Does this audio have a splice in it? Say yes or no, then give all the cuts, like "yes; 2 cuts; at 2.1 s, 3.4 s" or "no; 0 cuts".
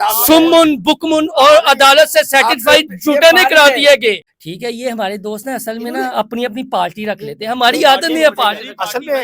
yes; 1 cut; at 4.3 s